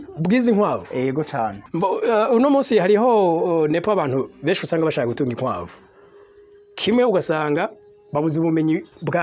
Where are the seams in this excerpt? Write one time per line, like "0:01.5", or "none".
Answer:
0:01.6